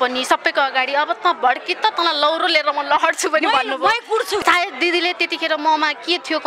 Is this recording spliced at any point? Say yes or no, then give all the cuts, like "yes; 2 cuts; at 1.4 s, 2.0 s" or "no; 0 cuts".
yes; 1 cut; at 4.4 s